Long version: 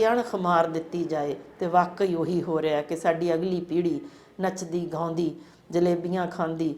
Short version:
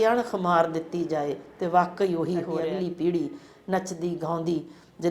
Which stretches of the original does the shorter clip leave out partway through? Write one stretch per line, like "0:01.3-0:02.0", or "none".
0:02.6-0:03.3